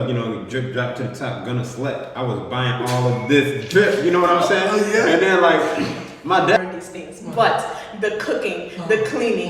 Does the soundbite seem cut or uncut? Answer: cut